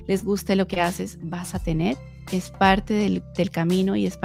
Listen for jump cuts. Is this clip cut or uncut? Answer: uncut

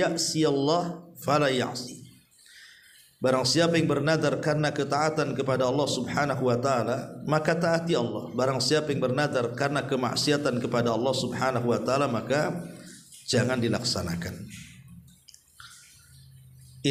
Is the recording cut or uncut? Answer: uncut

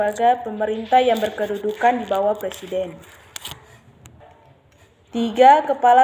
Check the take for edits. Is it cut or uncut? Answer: uncut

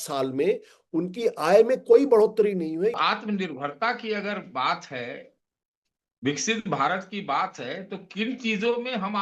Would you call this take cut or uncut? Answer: cut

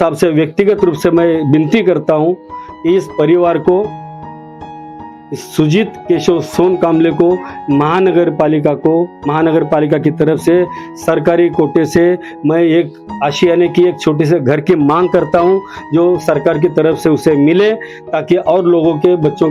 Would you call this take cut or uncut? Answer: uncut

